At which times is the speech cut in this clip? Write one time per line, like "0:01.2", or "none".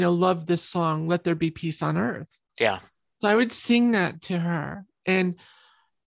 none